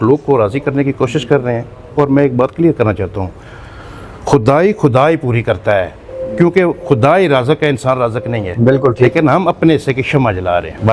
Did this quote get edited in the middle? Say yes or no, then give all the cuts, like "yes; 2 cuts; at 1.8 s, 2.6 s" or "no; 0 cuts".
no; 0 cuts